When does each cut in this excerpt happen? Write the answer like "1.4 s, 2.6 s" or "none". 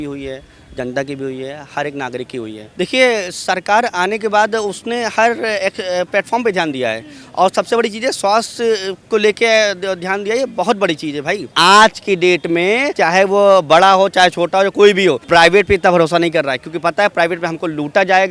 2.6 s, 11.5 s, 12.9 s, 15.2 s